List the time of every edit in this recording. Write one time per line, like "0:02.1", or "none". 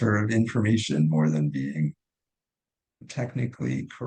0:03.0